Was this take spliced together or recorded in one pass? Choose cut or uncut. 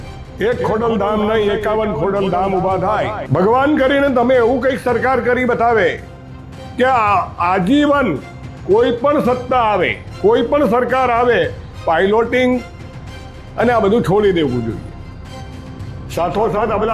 cut